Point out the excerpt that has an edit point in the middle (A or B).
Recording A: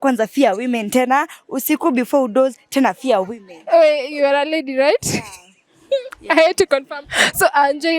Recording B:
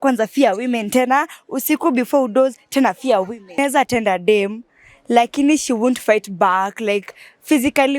B